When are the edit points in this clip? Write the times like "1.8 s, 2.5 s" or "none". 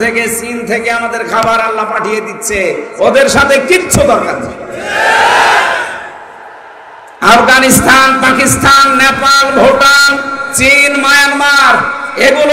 none

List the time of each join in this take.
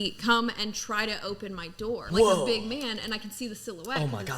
2.0 s

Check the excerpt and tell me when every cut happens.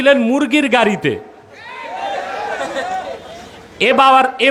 none

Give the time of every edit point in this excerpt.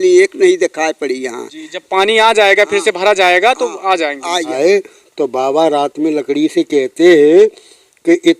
4.5 s

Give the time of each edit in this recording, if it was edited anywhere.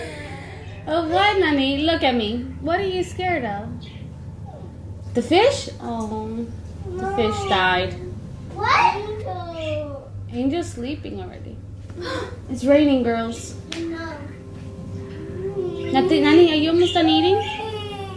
none

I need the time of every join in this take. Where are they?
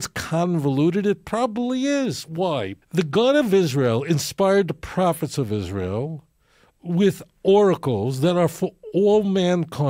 2.8 s

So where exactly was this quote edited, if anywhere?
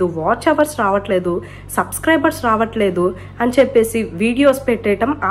none

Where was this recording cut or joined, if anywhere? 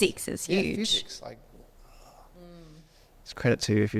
none

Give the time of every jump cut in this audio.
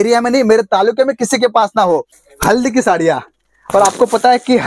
2.1 s

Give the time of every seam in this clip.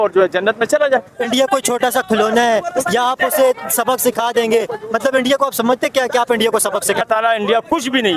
1.2 s, 7.1 s

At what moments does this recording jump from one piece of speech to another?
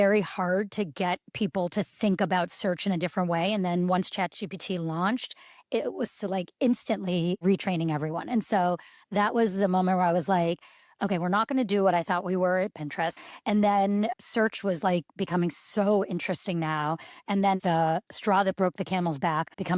none

